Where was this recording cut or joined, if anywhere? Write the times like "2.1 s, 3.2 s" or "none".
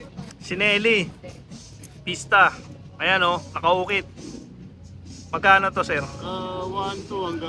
none

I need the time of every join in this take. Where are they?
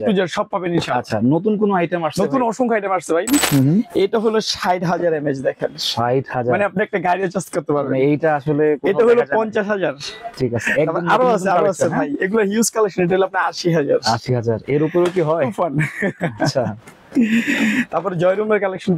3.4 s

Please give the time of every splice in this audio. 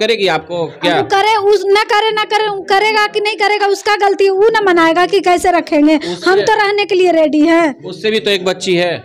none

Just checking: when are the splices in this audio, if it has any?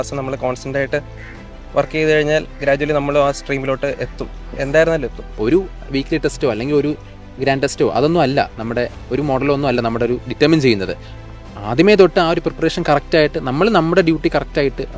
5.4 s

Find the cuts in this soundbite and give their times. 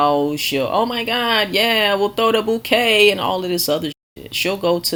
none

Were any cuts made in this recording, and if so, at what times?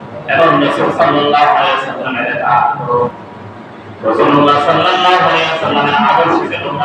3.2 s

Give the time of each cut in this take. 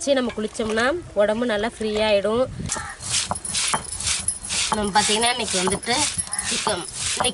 2.7 s

